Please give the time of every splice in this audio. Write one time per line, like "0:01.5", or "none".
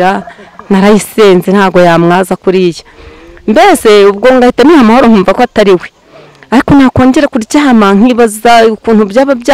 none

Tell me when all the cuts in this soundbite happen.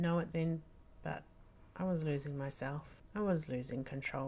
0:02.9

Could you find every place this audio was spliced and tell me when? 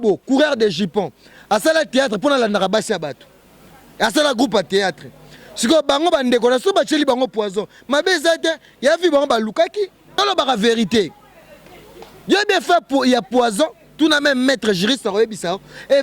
0:10.0

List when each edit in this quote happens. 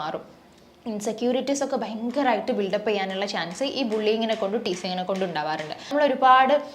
0:05.8

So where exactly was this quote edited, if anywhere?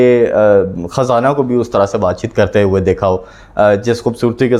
none

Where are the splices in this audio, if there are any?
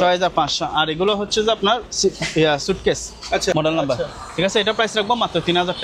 0:03.5

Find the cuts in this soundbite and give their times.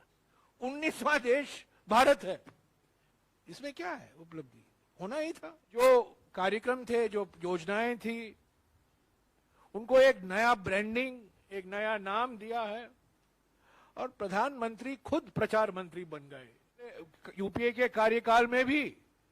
0:05.8
0:17.1

